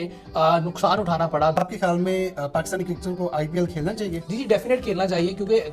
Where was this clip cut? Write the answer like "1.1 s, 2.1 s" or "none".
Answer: none